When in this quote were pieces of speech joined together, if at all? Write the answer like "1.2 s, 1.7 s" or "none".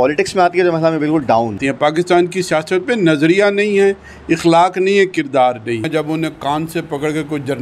1.6 s, 5.9 s